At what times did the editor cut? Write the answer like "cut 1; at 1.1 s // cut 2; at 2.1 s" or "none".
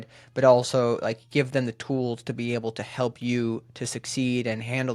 none

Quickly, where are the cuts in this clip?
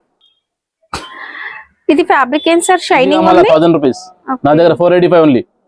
cut 1; at 3.2 s

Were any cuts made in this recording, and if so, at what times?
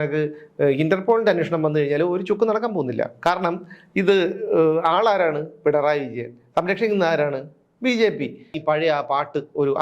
cut 1; at 8.6 s

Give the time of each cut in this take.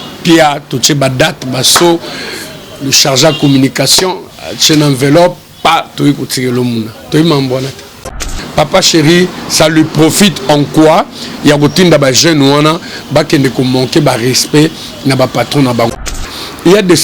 cut 1; at 8.3 s // cut 2; at 16.0 s

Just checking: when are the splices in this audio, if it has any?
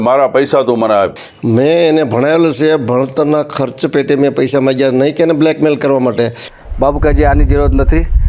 cut 1; at 1.3 s // cut 2; at 6.5 s

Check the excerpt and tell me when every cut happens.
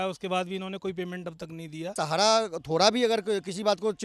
cut 1; at 1.9 s

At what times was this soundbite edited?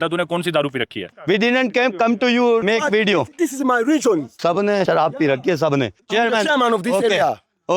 cut 1; at 1.1 s // cut 2; at 4.3 s // cut 3; at 6.0 s

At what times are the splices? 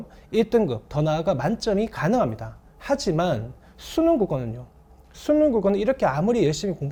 none

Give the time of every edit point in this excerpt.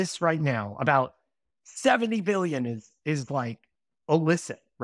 none

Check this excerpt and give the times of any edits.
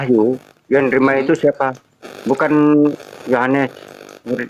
none

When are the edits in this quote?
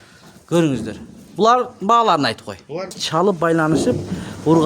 cut 1; at 3.0 s

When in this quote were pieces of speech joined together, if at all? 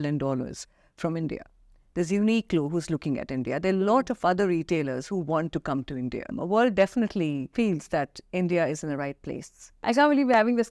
cut 1; at 6.4 s // cut 2; at 7.5 s // cut 3; at 9.8 s

